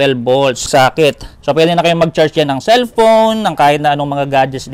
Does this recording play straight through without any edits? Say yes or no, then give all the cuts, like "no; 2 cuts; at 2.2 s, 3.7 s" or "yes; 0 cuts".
no; 1 cut; at 0.9 s